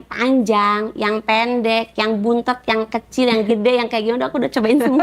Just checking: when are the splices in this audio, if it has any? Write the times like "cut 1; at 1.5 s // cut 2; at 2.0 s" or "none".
none